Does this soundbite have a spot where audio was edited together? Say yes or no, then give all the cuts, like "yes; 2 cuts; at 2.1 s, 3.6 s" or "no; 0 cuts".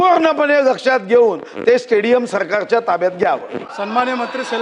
no; 0 cuts